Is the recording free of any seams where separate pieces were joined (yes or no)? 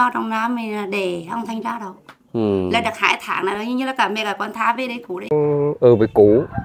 no